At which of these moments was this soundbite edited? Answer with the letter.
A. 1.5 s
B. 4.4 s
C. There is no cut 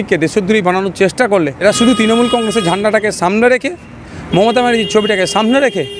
A